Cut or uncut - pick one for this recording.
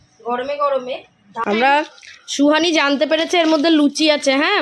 cut